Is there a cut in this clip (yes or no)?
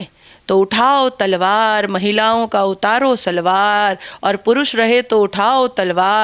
no